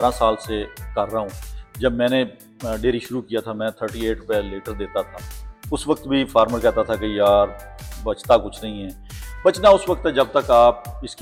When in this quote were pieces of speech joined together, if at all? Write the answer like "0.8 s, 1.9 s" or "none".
none